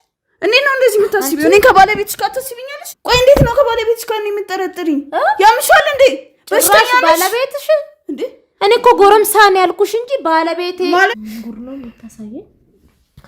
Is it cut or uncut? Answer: cut